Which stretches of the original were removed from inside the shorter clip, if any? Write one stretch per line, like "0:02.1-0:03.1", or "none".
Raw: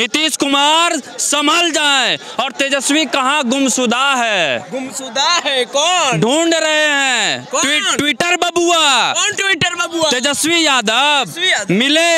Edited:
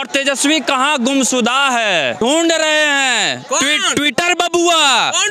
0:04.7-0:06.2